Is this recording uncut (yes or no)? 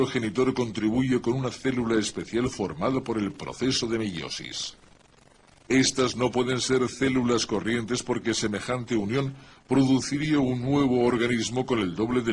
no